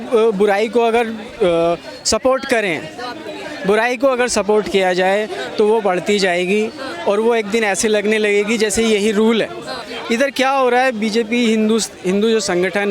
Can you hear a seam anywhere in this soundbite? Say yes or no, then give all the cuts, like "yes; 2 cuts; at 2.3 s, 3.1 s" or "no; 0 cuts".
yes; 1 cut; at 9.9 s